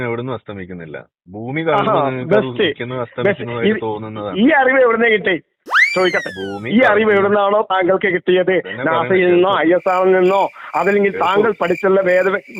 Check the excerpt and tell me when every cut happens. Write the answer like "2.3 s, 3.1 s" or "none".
none